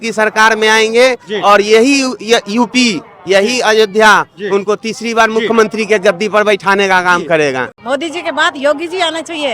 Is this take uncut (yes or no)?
no